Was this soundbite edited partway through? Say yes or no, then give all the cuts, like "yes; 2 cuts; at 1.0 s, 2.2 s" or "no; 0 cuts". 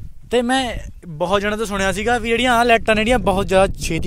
no; 0 cuts